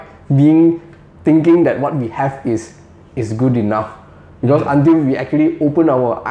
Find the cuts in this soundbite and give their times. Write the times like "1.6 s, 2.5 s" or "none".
none